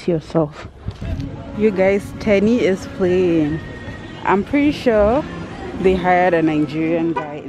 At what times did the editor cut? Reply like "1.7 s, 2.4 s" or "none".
1.0 s